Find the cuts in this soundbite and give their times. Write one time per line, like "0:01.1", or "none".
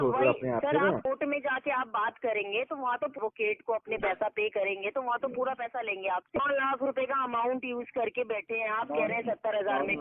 0:01.0
0:03.2
0:06.4